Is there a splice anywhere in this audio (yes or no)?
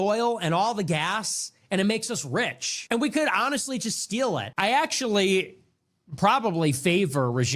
yes